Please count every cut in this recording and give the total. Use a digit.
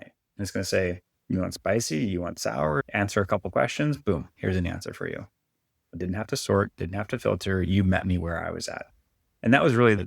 1